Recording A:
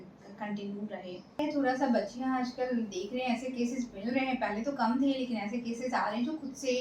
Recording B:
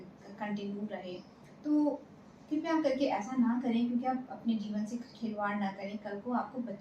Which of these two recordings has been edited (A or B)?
A